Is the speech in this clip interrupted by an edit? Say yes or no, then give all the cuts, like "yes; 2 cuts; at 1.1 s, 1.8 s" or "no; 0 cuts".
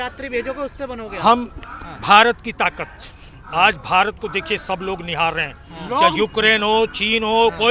no; 0 cuts